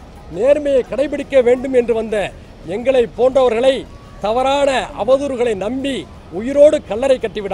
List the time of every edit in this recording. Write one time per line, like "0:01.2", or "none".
none